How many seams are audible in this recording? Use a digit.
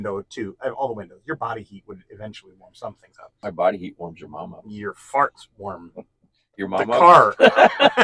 1